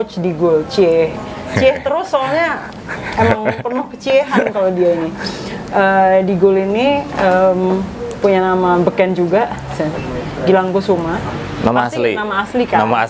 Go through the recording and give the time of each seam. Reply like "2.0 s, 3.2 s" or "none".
none